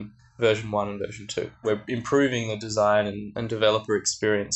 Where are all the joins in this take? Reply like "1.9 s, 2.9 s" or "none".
1.6 s

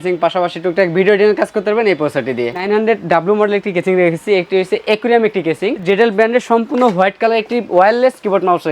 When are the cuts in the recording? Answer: 2.6 s, 5.8 s

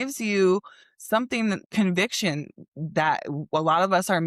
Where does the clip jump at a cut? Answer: 1.7 s

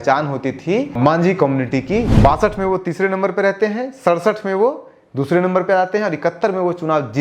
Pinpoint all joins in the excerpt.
1.0 s, 2.1 s

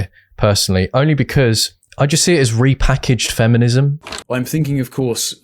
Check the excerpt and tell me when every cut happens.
4.0 s

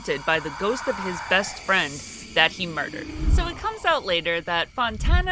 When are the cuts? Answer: 3.3 s

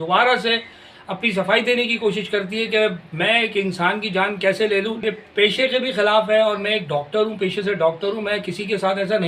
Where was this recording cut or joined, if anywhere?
5.0 s

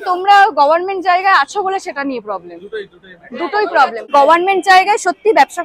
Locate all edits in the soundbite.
4.1 s

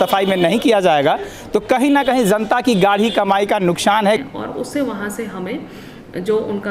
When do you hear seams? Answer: 4.1 s

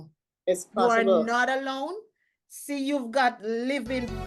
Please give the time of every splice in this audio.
none

